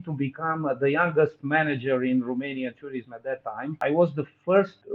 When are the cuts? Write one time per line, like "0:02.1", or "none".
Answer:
0:03.7